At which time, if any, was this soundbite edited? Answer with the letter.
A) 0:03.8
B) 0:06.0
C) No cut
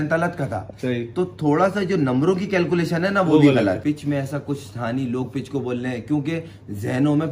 A